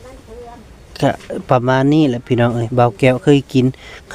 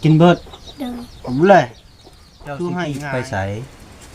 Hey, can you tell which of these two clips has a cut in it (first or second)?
second